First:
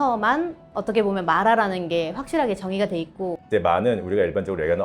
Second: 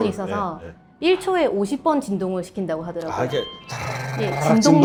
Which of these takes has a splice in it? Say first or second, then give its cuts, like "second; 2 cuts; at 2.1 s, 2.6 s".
first; 1 cut; at 3.4 s